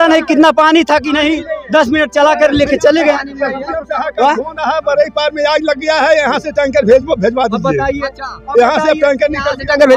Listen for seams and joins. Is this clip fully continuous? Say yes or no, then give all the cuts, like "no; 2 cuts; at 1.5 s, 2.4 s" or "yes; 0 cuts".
yes; 0 cuts